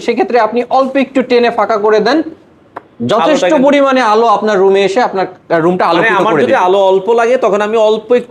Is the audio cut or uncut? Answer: uncut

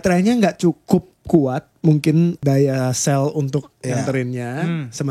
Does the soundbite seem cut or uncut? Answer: cut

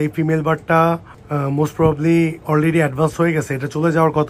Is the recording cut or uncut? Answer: uncut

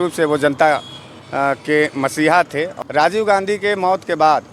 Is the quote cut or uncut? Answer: cut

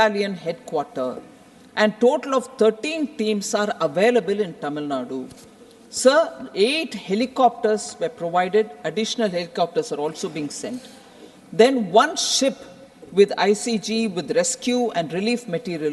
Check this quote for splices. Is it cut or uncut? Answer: uncut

